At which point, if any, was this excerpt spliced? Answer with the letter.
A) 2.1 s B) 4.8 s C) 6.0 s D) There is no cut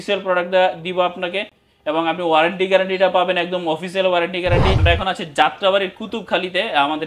B